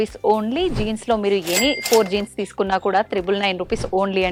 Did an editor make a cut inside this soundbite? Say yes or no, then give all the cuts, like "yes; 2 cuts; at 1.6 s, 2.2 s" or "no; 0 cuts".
no; 0 cuts